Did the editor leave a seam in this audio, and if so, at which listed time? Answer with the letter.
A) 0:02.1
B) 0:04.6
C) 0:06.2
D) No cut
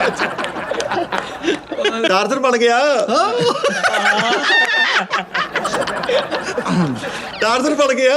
D